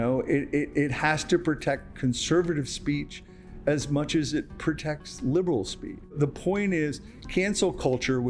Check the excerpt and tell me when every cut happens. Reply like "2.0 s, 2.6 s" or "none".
6.0 s